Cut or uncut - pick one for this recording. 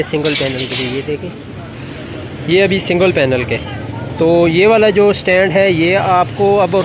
uncut